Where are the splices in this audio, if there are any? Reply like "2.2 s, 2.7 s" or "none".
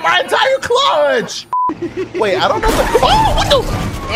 1.7 s